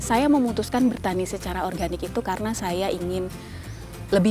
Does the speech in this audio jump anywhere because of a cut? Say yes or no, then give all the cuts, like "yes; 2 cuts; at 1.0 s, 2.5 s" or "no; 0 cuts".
no; 0 cuts